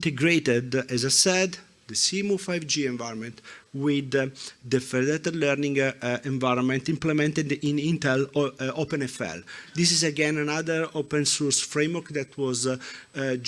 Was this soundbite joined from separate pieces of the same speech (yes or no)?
no